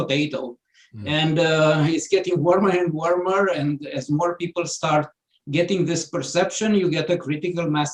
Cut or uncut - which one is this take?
uncut